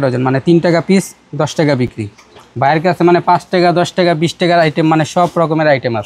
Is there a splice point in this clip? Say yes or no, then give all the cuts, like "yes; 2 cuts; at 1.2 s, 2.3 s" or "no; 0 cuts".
no; 0 cuts